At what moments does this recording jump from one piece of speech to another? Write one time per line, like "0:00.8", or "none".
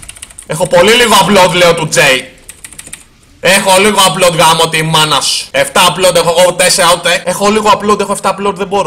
0:05.4
0:07.2